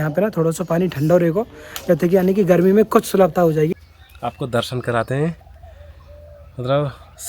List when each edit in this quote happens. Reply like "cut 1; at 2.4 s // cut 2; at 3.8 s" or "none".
cut 1; at 3.7 s